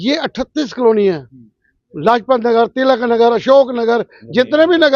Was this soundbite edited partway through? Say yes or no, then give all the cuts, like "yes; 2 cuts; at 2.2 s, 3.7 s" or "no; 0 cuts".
no; 0 cuts